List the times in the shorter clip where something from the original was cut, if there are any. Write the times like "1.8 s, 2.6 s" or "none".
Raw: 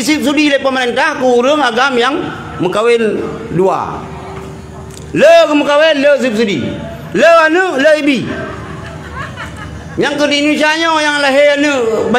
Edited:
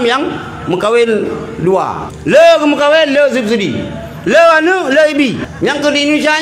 2.1 s, 5.5 s